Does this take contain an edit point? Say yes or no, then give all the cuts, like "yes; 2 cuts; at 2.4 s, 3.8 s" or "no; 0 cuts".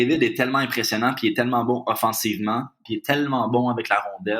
yes; 1 cut; at 2.9 s